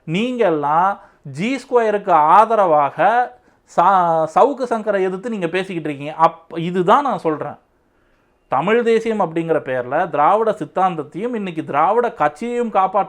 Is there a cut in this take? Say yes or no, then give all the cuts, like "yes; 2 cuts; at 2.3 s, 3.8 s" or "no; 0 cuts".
no; 0 cuts